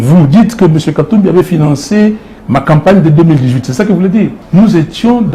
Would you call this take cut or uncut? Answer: cut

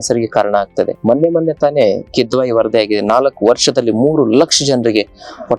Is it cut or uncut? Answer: uncut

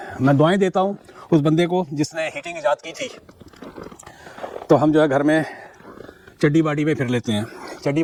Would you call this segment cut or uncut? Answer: uncut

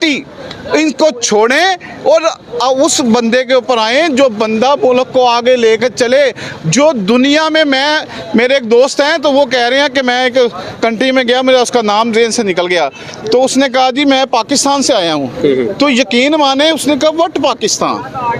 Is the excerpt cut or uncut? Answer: uncut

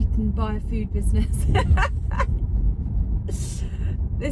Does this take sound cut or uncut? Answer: uncut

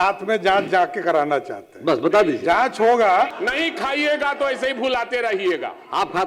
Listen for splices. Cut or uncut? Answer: cut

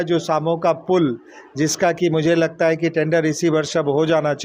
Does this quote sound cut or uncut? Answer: uncut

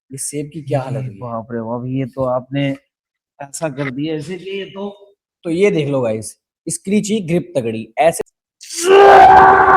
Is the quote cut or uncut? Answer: cut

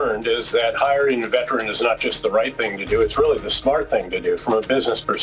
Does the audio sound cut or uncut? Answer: uncut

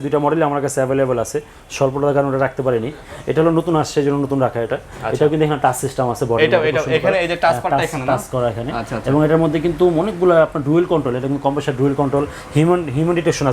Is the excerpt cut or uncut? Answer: uncut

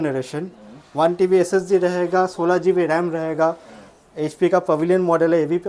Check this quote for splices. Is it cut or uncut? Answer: uncut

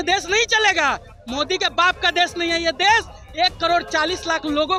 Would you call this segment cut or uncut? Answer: uncut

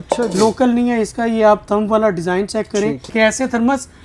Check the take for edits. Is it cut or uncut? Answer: cut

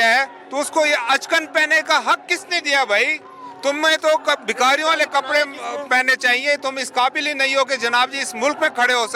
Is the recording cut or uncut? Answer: uncut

